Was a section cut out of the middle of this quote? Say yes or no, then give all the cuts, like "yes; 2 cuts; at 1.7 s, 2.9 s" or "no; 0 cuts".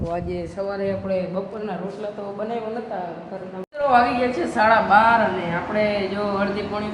yes; 1 cut; at 3.6 s